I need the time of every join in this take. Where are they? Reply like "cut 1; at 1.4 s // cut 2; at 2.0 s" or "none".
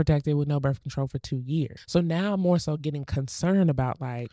cut 1; at 1.8 s